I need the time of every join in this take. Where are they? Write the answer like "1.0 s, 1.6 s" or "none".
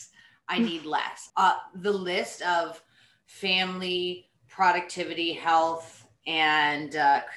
none

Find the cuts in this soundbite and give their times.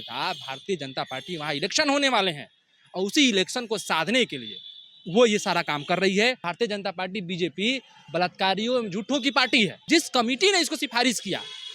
6.5 s, 9.8 s

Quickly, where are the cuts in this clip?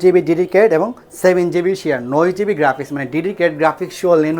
none

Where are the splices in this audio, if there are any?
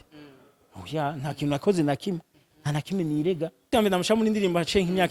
3.7 s

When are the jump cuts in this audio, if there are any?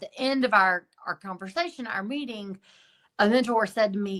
none

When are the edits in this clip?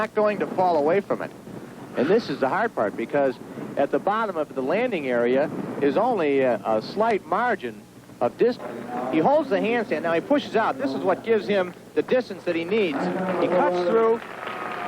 8.7 s

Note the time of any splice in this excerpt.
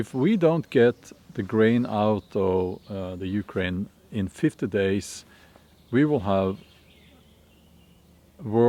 none

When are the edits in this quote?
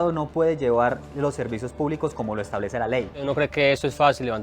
3.2 s

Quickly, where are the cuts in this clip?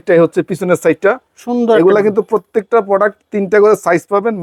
none

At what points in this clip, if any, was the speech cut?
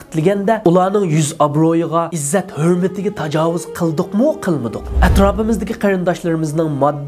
4.8 s

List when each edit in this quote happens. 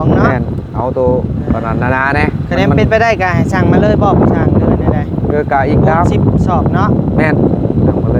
none

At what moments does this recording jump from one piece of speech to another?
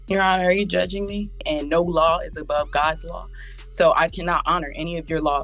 1.4 s

